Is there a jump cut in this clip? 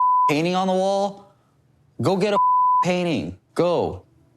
yes; 1 cut; at 3.4 s

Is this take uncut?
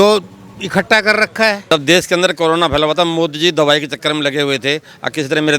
no; 1 cut; at 1.6 s

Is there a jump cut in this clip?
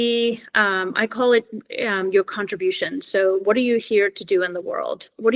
no; 0 cuts

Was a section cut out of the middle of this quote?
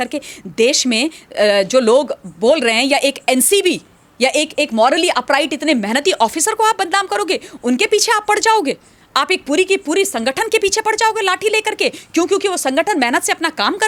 no; 0 cuts

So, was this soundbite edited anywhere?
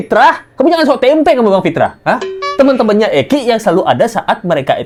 no; 0 cuts

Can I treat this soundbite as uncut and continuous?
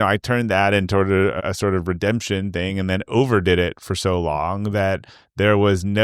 no; 1 cut; at 1.4 s

